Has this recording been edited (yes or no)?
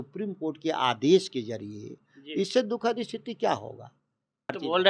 no